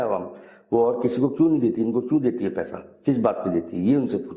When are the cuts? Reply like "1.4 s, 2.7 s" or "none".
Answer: none